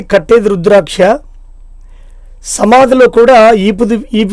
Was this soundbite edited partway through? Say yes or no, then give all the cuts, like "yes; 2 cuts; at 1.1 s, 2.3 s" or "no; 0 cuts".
no; 0 cuts